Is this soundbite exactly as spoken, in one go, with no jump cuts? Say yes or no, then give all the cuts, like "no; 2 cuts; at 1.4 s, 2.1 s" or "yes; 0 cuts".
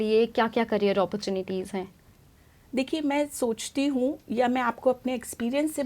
yes; 0 cuts